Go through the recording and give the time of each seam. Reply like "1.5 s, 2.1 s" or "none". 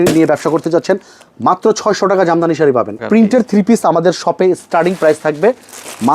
3.0 s